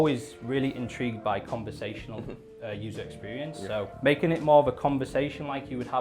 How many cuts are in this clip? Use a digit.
1